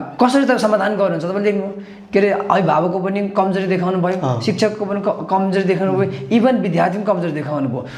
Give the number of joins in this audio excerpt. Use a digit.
0